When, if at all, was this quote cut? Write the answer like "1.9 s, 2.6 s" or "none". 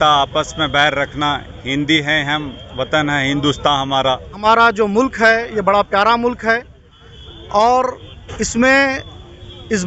4.3 s